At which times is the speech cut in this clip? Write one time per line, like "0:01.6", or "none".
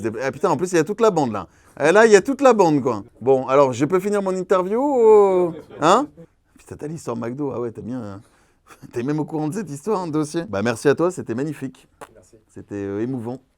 0:06.1
0:10.5